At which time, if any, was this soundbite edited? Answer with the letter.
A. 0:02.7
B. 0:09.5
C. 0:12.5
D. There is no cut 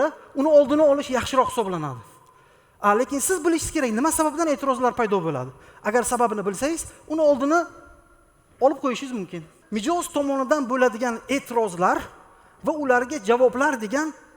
B